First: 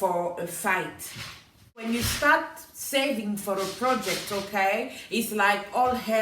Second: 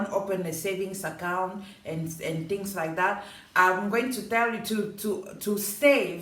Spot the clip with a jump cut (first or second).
first